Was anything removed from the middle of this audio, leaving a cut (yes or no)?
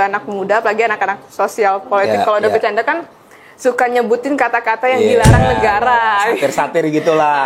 no